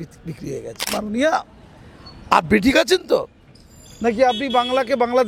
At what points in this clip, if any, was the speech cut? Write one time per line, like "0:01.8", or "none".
0:01.0